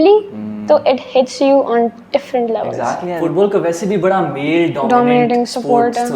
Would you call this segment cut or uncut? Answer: cut